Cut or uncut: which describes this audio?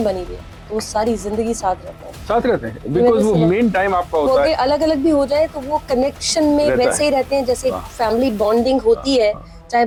uncut